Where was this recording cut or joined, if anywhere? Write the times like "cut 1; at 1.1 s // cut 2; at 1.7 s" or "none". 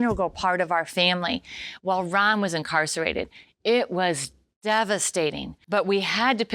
cut 1; at 5.5 s